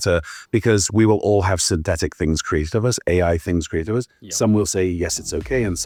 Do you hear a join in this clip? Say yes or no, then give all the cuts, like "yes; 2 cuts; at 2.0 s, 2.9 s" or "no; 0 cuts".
no; 0 cuts